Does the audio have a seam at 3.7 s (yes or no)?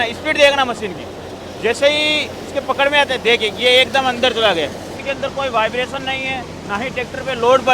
no